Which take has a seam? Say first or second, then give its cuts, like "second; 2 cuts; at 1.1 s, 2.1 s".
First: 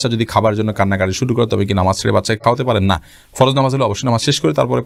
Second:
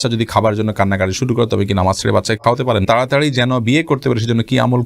second; 1 cut; at 2.8 s